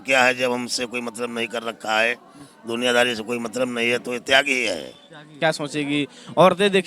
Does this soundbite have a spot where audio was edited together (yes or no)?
yes